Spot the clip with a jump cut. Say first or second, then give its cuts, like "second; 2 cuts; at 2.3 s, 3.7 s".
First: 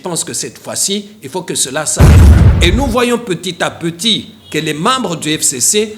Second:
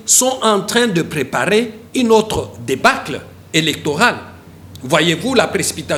first; 1 cut; at 2.3 s